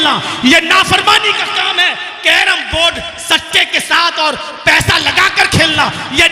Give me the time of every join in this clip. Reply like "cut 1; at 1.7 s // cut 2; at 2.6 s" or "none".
none